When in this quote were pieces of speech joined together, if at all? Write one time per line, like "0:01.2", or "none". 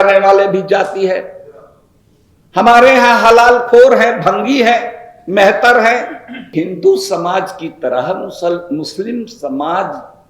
0:06.5